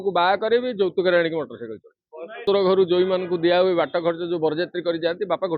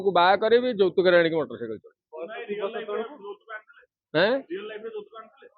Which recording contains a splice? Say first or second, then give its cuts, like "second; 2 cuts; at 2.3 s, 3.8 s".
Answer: first; 1 cut; at 2.4 s